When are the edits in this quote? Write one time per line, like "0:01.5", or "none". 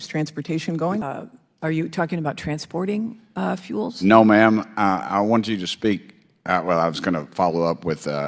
0:01.0